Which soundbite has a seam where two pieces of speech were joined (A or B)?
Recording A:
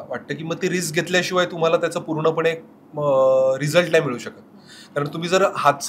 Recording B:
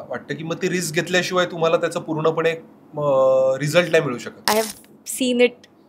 B